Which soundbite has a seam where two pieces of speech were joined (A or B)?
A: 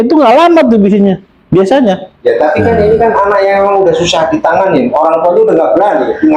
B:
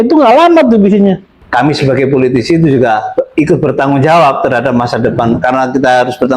B